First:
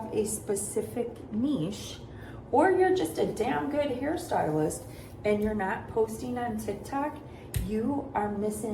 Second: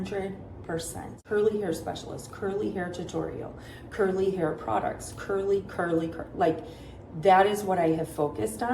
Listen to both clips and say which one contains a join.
second; 1 cut; at 1.1 s

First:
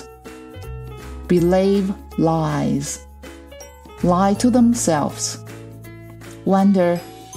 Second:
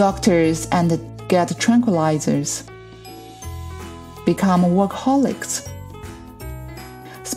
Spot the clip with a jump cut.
second; 2 cuts; at 2.5 s, 4.2 s

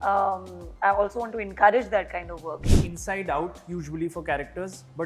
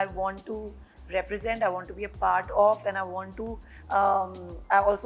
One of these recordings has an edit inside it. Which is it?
first; 1 cut; at 2.6 s

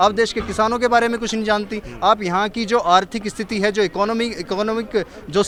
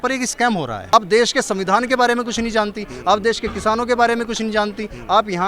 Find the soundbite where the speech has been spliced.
second; 1 cut; at 0.9 s

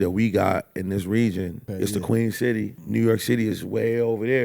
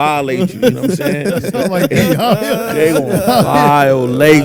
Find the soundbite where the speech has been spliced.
first; 2 cuts; at 1.6 s, 2.8 s

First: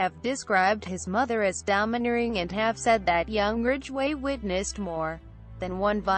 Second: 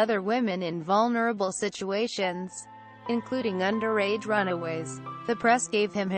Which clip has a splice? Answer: second; 1 cut; at 2.4 s

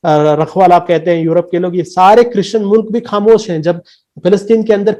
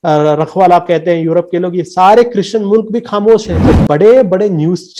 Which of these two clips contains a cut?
second; 1 cut; at 3.6 s

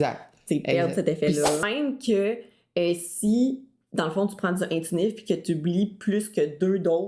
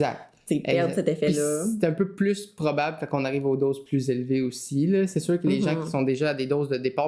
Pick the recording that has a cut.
first; 1 cut; at 1.6 s

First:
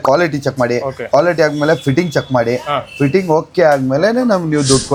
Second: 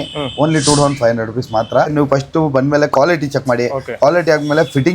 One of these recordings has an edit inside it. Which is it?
second; 1 cut; at 1.9 s

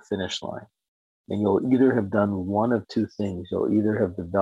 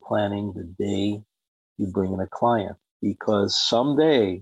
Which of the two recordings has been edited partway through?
second; 1 cut; at 2.8 s

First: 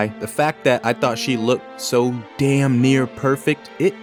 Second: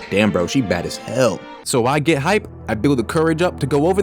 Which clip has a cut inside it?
second; 1 cut; at 1.5 s

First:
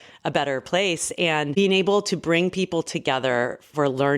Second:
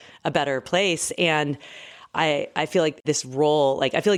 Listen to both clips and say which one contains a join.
first; 1 cut; at 1.5 s

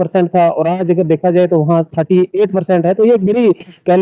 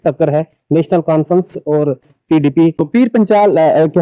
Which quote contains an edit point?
second; 1 cut; at 2.8 s

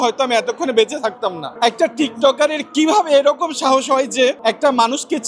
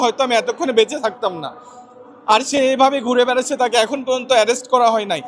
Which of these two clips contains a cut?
first; 2 cuts; at 1.4 s, 4.4 s

